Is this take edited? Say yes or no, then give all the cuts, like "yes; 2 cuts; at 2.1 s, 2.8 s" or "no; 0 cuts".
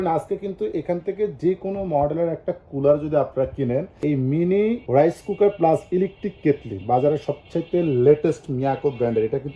no; 0 cuts